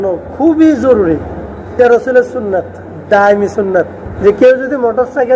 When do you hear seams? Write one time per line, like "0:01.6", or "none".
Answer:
0:01.8
0:04.0